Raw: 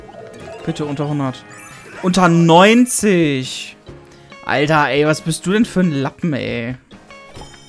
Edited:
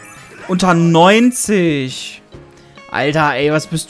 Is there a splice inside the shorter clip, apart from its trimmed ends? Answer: no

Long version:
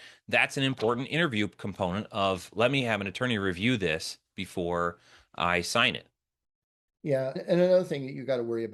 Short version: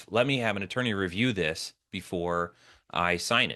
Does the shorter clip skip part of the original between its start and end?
no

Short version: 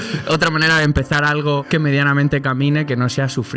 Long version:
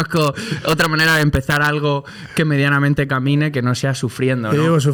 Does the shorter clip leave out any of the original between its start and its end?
yes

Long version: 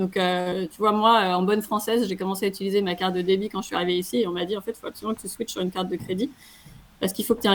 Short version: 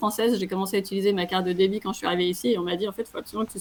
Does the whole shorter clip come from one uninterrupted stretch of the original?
yes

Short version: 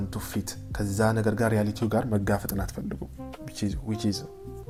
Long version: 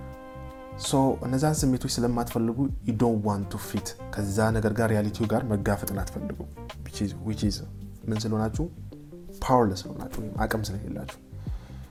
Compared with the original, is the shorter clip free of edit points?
yes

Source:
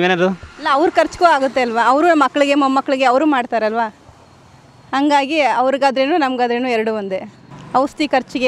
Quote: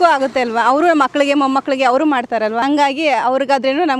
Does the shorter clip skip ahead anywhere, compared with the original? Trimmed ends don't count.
yes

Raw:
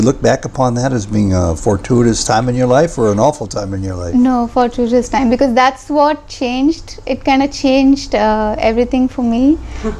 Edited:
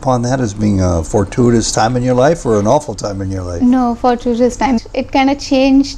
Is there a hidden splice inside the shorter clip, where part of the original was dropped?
yes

